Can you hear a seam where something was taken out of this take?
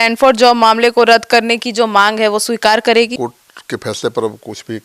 yes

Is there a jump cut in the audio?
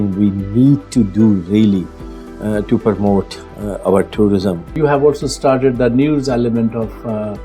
yes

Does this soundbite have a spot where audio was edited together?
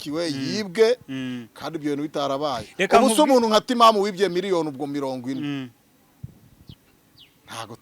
yes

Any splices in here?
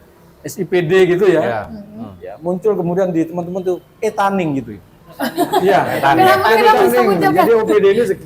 no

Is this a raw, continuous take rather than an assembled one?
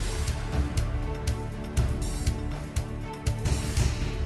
no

